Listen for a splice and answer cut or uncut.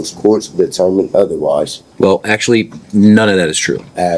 cut